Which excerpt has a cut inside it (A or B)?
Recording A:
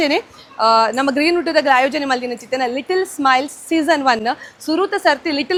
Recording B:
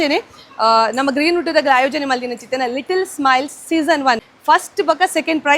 B